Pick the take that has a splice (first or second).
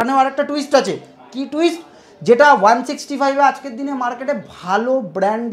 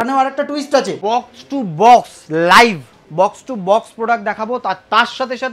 second